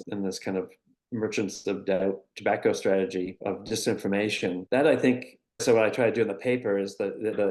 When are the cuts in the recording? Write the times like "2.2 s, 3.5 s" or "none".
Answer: 3.3 s, 4.6 s